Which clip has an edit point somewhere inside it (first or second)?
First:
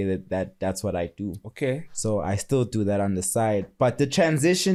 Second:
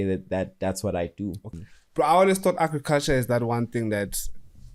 second